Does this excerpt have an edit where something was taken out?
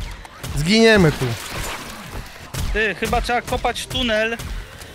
yes; 1 cut; at 2.4 s

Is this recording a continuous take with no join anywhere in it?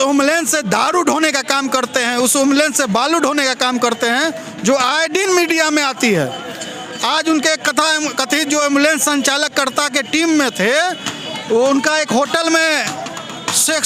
yes; 0 cuts

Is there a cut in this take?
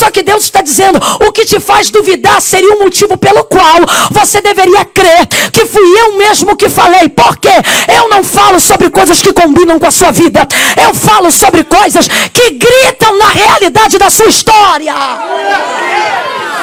no; 0 cuts

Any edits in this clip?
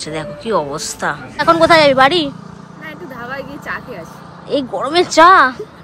yes; 1 cut; at 1.4 s

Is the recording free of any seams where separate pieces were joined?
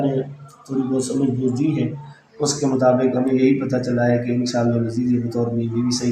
yes; 0 cuts

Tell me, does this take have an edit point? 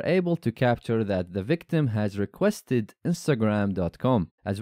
no; 0 cuts

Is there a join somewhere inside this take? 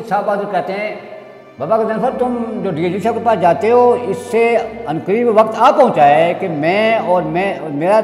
no; 0 cuts

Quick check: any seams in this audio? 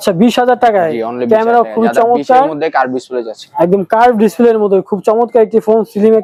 no; 0 cuts

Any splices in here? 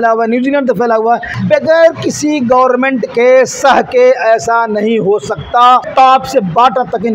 yes; 2 cuts; at 1.3 s, 5.9 s

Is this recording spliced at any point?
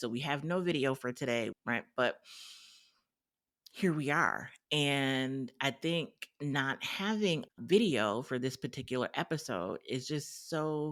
no; 0 cuts

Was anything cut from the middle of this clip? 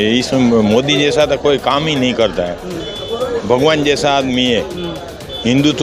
no; 0 cuts

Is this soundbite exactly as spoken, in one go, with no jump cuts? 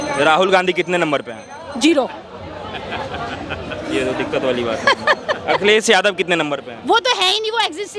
yes; 0 cuts

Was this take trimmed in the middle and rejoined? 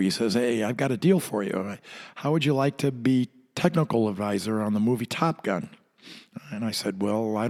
no; 0 cuts

